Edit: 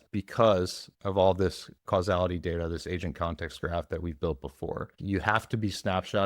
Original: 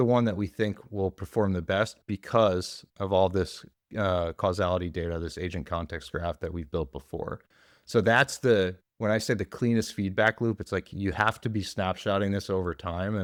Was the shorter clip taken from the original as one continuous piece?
no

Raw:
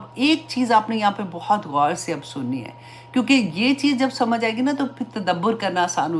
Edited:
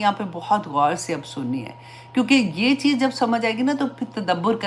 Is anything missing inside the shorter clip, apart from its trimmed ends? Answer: no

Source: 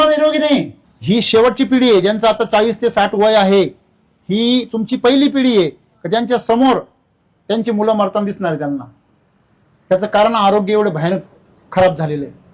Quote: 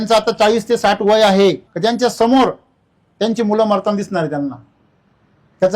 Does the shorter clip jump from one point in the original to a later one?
yes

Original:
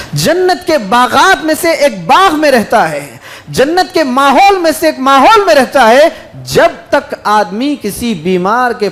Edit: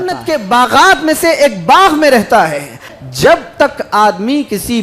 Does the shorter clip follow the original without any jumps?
no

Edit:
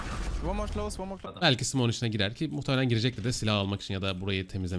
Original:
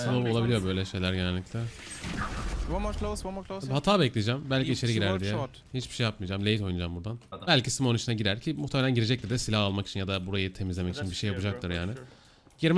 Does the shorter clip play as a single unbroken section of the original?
no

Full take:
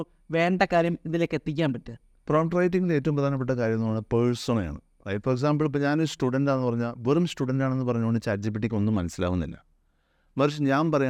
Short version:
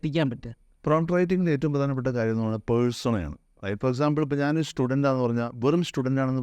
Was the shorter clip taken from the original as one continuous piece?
yes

